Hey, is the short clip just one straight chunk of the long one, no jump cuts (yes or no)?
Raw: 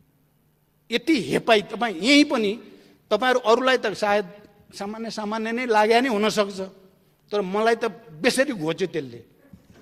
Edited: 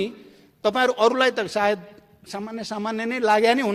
yes